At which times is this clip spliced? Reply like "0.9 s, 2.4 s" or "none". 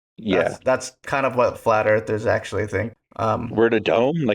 3.0 s